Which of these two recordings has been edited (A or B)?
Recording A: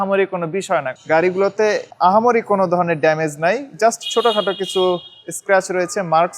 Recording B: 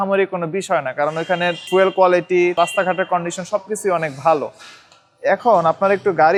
A